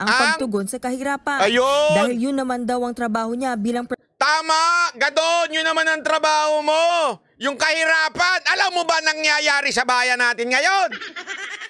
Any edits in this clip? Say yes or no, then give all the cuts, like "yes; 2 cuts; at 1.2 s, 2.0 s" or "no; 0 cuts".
no; 0 cuts